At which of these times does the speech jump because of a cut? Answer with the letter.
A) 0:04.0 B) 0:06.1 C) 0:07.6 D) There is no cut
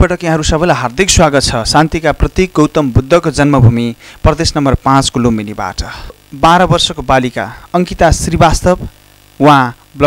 B